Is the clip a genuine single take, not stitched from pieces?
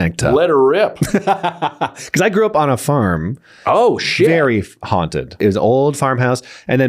no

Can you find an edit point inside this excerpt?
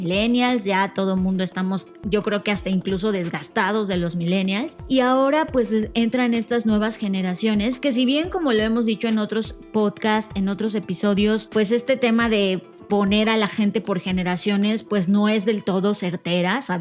yes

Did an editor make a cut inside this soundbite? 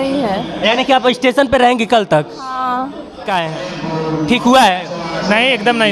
yes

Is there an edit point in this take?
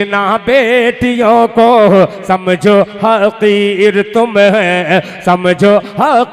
no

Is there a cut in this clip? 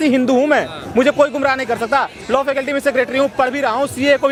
no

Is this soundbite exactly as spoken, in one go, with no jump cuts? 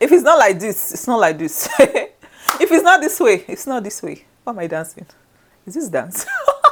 yes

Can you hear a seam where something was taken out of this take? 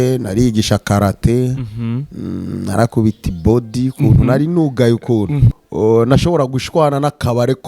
yes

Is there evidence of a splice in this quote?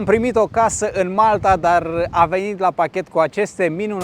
no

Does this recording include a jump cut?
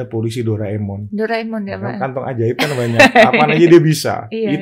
no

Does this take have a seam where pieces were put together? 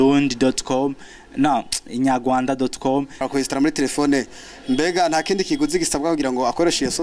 yes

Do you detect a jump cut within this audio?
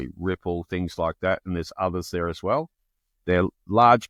no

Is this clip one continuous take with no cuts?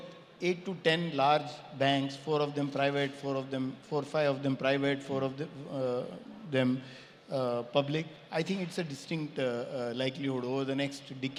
yes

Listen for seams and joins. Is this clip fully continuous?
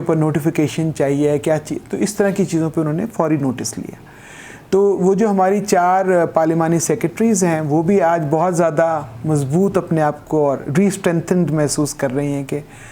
yes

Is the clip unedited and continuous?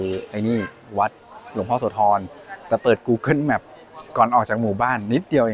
yes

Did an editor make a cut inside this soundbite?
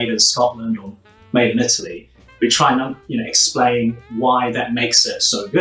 no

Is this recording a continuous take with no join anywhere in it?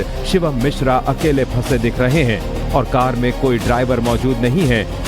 yes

